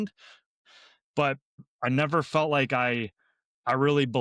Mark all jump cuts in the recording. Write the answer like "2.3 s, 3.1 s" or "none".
1.7 s